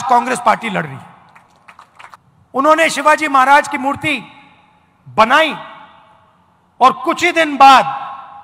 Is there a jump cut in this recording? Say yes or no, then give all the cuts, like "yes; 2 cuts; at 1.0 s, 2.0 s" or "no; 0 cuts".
yes; 1 cut; at 2.2 s